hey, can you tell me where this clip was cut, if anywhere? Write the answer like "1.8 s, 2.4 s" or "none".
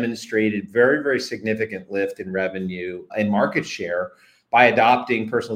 3.1 s